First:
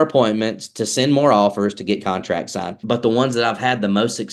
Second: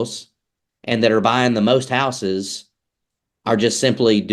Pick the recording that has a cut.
first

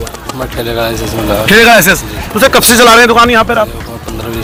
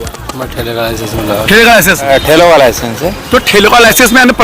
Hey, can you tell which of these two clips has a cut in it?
second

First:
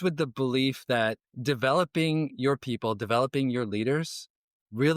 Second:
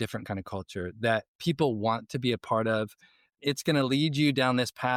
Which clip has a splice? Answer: first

